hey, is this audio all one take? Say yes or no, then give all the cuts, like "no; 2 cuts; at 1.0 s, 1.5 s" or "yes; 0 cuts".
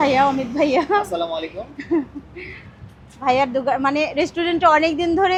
yes; 0 cuts